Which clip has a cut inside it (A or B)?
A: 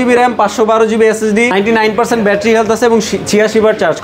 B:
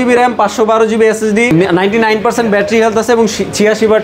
A